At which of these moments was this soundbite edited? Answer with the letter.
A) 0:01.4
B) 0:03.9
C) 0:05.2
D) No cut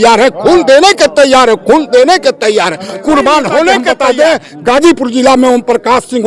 B